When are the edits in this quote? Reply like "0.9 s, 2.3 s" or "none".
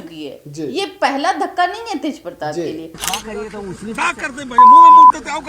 3.1 s